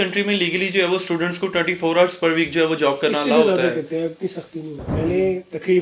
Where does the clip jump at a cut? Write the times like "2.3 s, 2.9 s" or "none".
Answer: 4.9 s